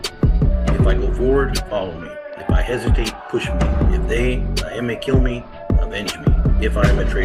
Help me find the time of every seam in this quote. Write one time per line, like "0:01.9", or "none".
none